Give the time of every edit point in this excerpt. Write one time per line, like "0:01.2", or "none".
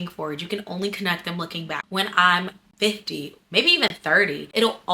0:01.8